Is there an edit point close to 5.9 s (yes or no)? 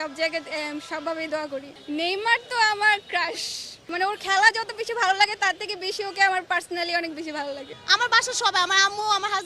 no